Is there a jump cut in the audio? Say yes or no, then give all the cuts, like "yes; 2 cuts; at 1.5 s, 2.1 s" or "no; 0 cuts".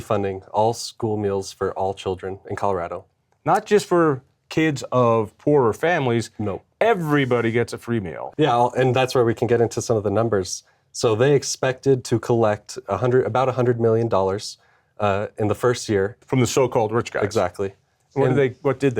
yes; 2 cuts; at 8.2 s, 16.2 s